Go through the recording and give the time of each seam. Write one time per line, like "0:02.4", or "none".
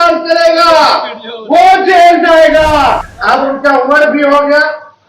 0:03.1